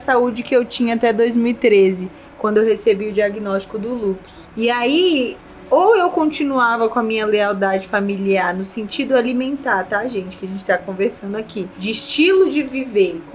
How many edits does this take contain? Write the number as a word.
two